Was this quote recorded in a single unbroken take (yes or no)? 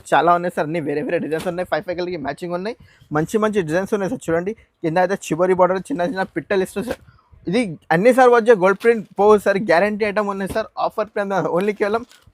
yes